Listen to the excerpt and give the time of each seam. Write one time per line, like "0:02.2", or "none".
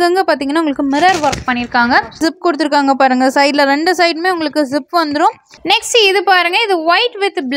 0:02.2
0:05.5